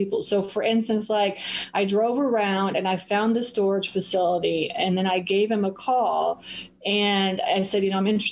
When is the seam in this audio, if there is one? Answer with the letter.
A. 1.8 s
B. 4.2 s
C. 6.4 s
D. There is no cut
D